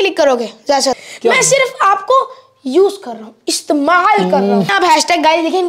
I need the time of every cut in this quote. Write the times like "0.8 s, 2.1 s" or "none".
1.1 s, 4.7 s